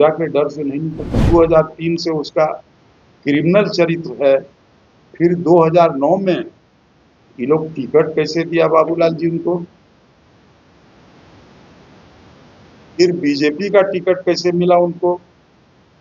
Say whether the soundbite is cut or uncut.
cut